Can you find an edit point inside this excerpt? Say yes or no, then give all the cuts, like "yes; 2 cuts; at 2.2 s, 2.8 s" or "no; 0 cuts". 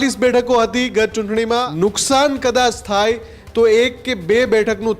yes; 1 cut; at 1.7 s